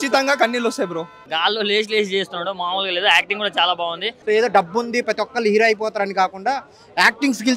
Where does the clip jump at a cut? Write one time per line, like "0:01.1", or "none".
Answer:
0:01.1
0:04.1